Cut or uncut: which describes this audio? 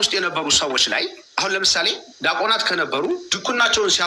uncut